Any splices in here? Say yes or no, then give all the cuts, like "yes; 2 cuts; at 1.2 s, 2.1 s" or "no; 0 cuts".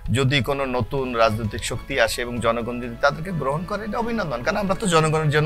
no; 0 cuts